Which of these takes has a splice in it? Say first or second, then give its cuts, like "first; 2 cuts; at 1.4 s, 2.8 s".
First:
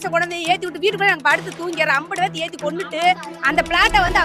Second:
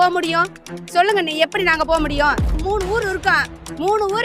second; 1 cut; at 2.5 s